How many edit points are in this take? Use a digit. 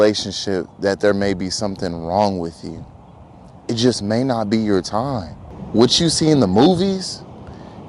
1